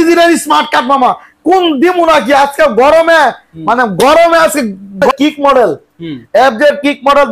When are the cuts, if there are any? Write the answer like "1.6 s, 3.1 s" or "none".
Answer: 5.1 s

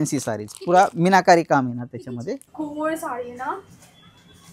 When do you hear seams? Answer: 2.3 s

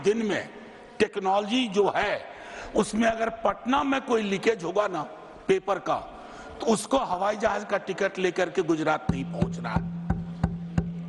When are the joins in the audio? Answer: none

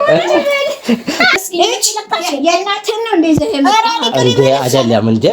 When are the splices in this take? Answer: 1.4 s

